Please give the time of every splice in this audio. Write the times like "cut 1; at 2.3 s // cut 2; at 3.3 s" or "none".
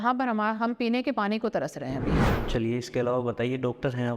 cut 1; at 2.3 s